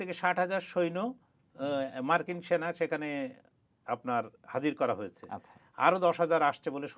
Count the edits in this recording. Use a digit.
0